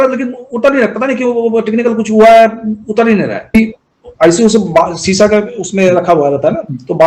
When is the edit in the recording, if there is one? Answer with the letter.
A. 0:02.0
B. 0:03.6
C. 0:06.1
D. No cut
B